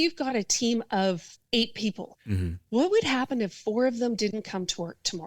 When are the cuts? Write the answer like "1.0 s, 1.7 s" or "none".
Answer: 1.3 s, 2.1 s